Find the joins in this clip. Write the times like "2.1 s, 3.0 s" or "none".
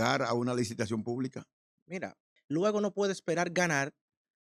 2.3 s